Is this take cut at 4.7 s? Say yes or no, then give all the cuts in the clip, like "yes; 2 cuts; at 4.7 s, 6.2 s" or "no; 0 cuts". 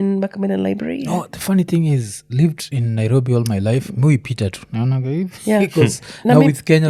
no; 0 cuts